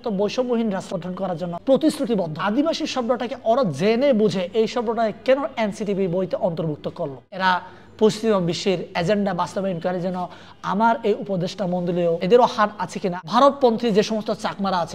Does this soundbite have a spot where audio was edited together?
yes; 5 cuts; at 0.9 s, 2.4 s, 7.3 s, 12.2 s, 13.2 s

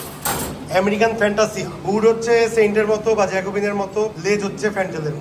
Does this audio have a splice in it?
yes; 2 cuts; at 1.7 s, 4.2 s

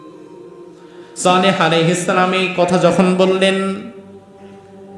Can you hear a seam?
yes; 1 cut; at 4.0 s

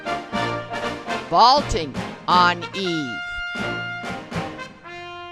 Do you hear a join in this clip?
yes; 1 cut; at 1.2 s

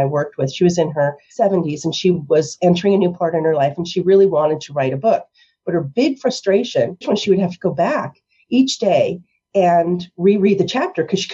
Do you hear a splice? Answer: yes; 2 cuts; at 1.2 s, 7.0 s

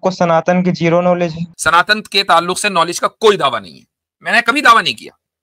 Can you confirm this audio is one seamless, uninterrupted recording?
no; 1 cut; at 1.5 s

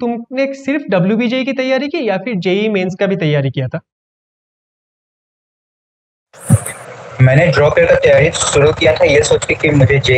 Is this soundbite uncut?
yes; 0 cuts

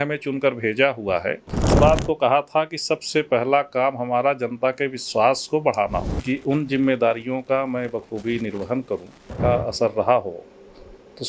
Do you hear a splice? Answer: yes; 3 cuts; at 1.7 s, 6.1 s, 9.3 s

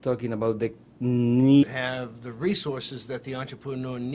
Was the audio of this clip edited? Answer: no; 0 cuts

